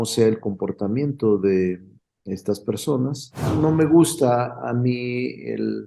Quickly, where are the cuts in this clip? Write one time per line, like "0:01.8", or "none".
0:03.5